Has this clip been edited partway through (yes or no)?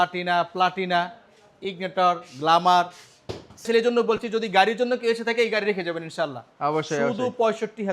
yes